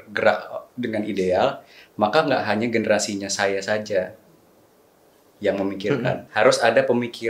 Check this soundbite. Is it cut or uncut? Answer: cut